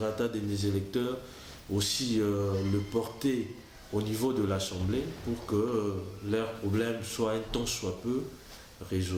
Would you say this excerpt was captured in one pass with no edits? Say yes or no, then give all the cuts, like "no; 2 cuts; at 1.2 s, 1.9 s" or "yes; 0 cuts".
yes; 0 cuts